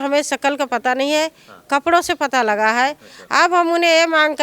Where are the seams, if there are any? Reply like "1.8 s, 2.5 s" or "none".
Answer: none